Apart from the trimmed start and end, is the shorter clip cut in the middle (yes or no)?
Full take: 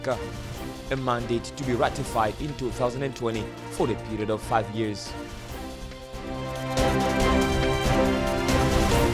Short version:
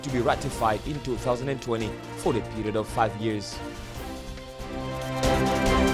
no